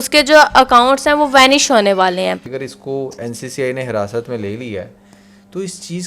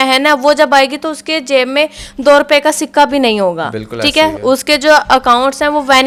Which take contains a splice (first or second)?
first